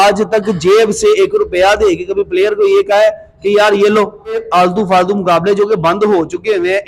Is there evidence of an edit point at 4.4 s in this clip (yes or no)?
yes